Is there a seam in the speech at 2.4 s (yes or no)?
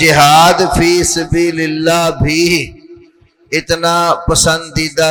no